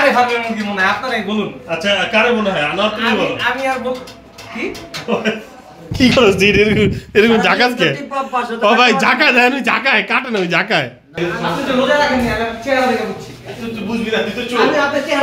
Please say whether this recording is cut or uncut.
cut